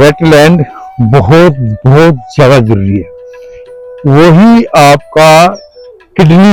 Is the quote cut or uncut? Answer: uncut